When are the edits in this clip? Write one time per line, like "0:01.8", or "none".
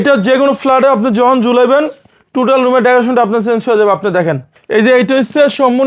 0:04.5